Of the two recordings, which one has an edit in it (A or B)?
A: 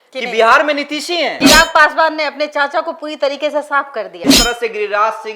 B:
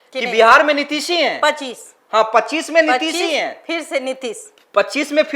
A